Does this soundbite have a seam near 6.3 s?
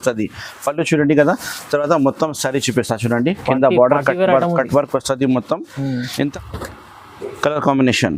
yes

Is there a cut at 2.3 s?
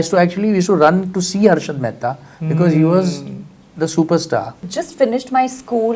no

